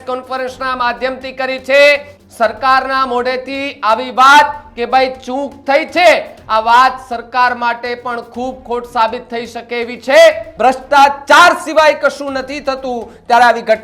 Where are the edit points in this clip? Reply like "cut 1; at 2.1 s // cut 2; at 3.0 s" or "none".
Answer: cut 1; at 2.1 s // cut 2; at 10.5 s